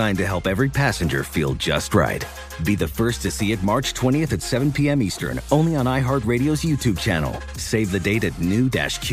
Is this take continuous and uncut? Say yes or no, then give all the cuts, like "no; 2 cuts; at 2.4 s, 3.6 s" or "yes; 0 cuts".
yes; 0 cuts